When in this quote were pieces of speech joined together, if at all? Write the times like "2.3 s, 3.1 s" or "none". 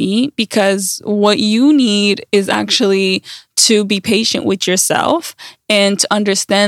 none